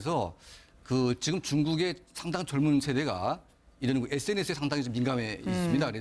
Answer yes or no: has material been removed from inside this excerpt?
no